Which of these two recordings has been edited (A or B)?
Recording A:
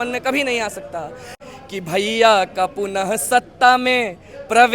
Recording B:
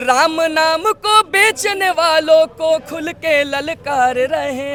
A